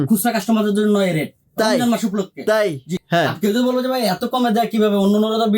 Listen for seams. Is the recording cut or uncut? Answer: cut